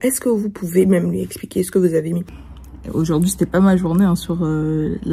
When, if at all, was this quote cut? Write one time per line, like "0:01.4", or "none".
0:02.3

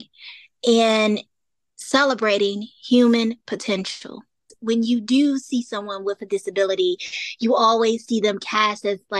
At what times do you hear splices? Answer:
0:04.5

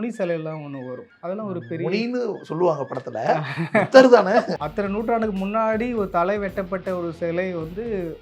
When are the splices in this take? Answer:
0:01.1
0:04.5

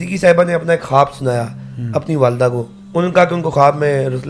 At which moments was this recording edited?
0:02.8

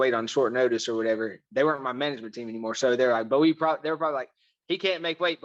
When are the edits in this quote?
none

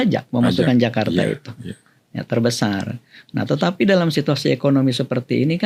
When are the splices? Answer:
none

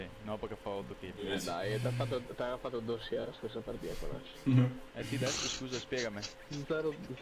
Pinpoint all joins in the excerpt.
0:01.3

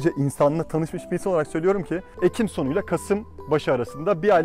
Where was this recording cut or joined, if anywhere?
0:02.0

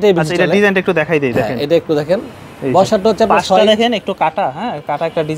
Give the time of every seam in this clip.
none

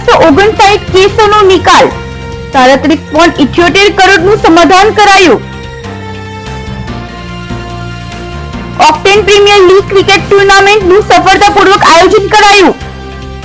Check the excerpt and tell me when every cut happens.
none

